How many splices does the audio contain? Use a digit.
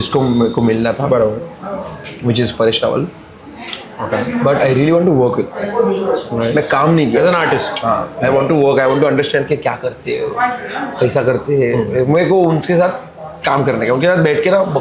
0